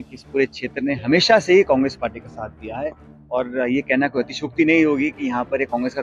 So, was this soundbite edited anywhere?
no; 0 cuts

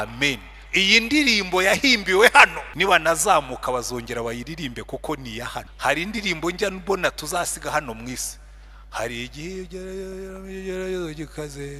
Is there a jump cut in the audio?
yes; 2 cuts; at 2.6 s, 5.7 s

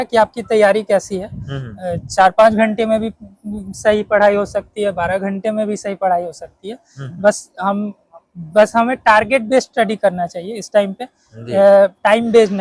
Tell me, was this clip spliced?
no; 0 cuts

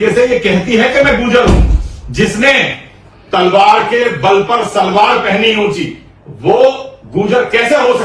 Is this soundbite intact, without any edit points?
yes; 0 cuts

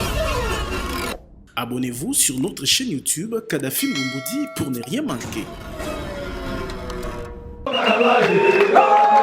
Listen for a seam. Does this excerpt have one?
yes; 1 cut; at 7.6 s

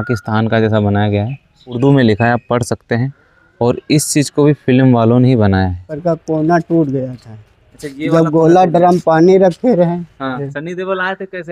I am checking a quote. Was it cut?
yes; 3 cuts; at 1.8 s, 5.9 s, 10.5 s

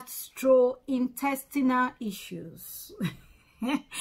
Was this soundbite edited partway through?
no; 0 cuts

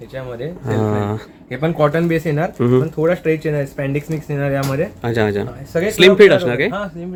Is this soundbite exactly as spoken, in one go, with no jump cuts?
yes; 0 cuts

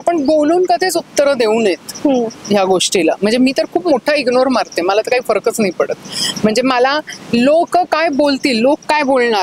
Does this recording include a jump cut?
no; 0 cuts

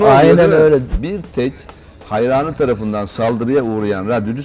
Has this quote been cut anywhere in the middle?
yes; 1 cut; at 1.0 s

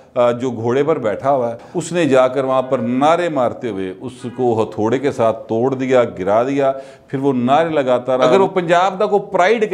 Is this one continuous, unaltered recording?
no; 2 cuts; at 1.7 s, 8.3 s

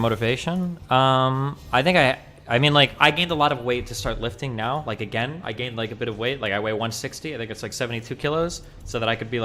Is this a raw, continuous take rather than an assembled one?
yes; 0 cuts

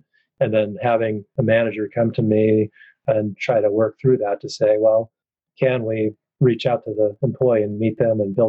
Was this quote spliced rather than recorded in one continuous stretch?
no; 0 cuts

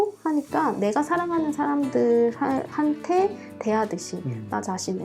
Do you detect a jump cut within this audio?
no; 0 cuts

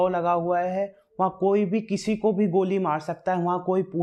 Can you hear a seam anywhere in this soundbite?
no; 0 cuts

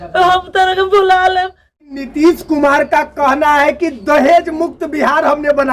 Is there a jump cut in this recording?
yes; 1 cut; at 2.1 s

